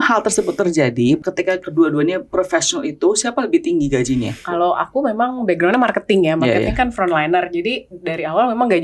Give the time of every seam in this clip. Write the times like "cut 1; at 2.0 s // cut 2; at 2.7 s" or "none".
cut 1; at 1.2 s // cut 2; at 4.4 s